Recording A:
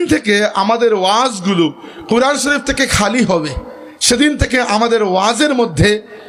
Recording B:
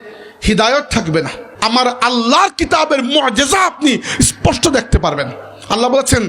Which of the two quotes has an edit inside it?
B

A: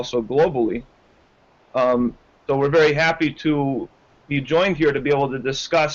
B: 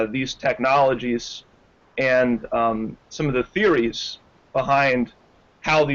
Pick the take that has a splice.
B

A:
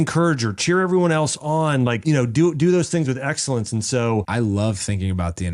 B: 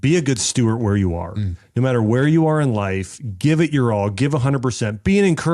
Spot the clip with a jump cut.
A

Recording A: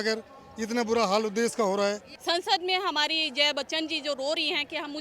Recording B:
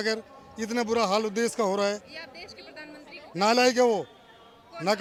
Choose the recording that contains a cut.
A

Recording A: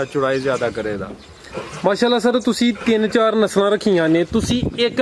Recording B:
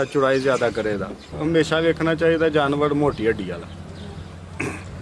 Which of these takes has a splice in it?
B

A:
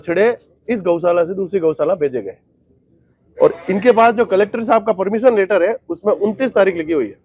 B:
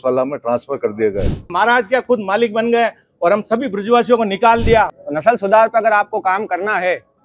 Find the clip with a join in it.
B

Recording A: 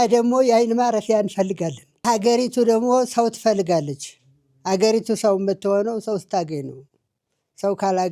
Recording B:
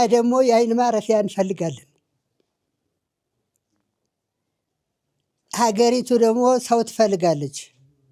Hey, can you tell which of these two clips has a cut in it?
A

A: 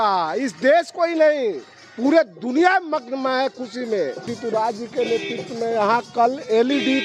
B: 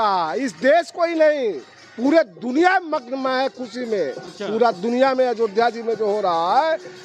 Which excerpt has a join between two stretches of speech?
A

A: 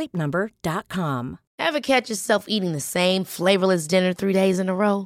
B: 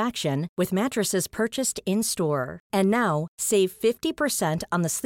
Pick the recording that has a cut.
A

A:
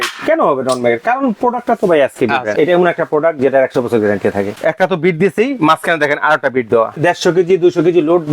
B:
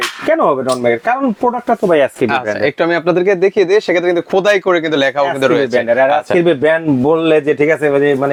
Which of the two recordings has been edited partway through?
A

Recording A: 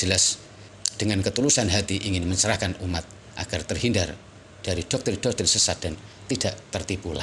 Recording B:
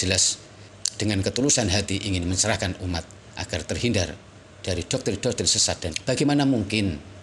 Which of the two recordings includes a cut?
B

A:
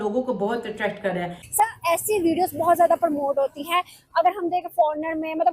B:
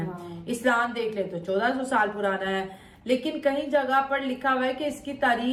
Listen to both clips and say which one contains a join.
A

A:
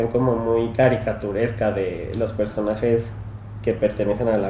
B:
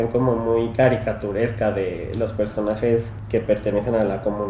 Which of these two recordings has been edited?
B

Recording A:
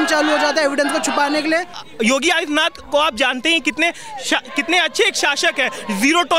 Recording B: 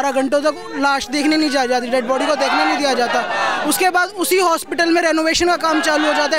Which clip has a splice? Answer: A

